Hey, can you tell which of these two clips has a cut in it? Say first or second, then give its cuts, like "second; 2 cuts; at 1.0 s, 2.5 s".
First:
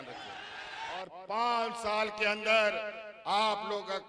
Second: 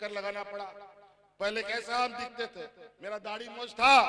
first; 1 cut; at 1.0 s